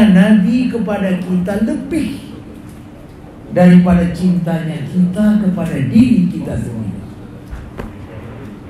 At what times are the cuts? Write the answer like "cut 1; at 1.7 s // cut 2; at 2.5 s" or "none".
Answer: none